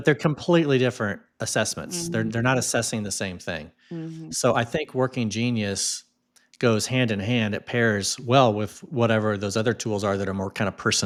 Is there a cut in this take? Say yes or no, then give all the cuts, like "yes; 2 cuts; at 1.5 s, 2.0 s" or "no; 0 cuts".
no; 0 cuts